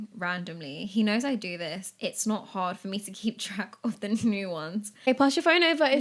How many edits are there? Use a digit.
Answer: 1